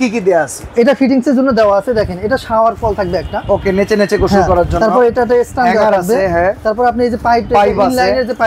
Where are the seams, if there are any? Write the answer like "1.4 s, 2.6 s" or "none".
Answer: none